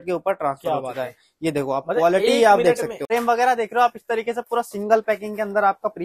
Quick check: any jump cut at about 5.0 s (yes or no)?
no